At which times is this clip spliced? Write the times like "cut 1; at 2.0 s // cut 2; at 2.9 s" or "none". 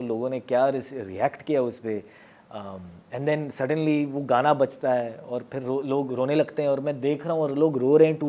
none